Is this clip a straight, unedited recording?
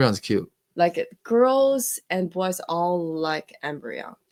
yes; 0 cuts

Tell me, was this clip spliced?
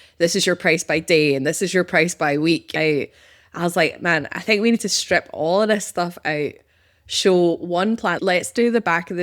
yes; 2 cuts; at 2.7 s, 8.2 s

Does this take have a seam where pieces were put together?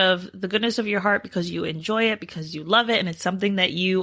no; 0 cuts

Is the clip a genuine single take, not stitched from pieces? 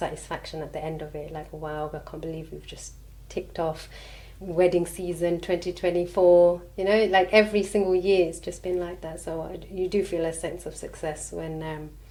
yes; 0 cuts

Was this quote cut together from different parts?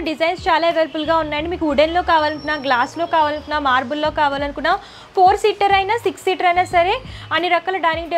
no; 0 cuts

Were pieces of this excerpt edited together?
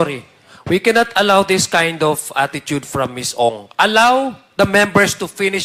no; 0 cuts

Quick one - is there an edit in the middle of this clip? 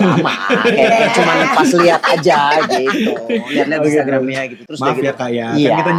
no; 0 cuts

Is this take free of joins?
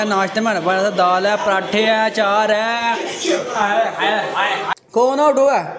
no; 1 cut; at 4.7 s

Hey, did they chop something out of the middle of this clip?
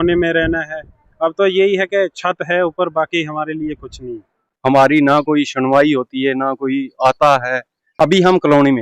yes; 1 cut; at 4.4 s

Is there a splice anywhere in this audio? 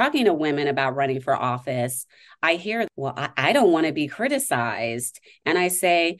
yes; 1 cut; at 2.9 s

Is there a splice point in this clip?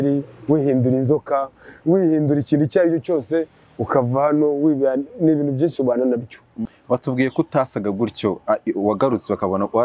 yes; 1 cut; at 6.5 s

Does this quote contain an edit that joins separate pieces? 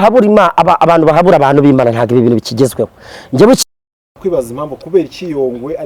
yes; 1 cut; at 3.6 s

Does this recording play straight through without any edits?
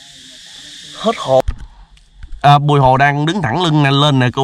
no; 1 cut; at 1.4 s

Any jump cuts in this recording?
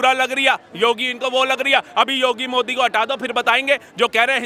no; 0 cuts

